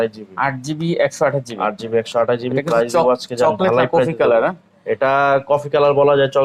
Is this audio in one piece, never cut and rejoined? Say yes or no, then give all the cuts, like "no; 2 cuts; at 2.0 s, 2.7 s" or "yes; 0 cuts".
yes; 0 cuts